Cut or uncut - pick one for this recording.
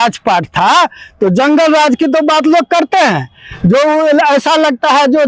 uncut